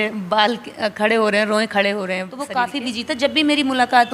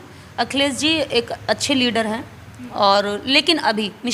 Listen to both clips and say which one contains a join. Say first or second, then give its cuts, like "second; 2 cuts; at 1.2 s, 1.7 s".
first; 1 cut; at 2.4 s